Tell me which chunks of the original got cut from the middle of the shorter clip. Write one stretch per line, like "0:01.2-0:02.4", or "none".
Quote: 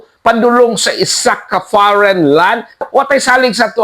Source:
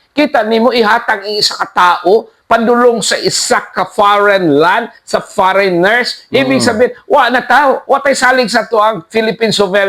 0:05.1-0:07.8